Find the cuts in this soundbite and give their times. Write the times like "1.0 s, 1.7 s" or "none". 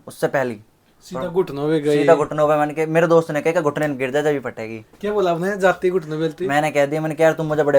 none